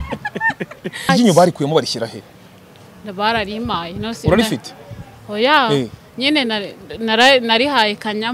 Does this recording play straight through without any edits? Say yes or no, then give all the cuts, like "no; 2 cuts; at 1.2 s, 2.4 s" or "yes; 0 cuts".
no; 1 cut; at 1.1 s